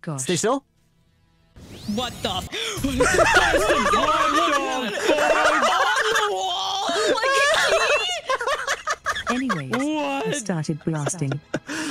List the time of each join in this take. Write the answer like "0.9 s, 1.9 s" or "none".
2.5 s